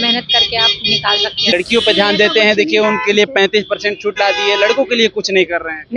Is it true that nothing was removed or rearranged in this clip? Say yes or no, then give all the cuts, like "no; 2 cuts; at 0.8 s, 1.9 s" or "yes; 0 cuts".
no; 1 cut; at 1.5 s